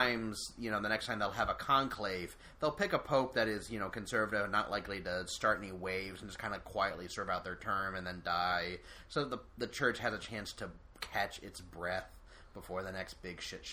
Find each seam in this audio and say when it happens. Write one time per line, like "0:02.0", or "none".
none